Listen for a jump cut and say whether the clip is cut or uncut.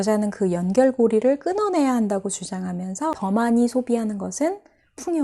cut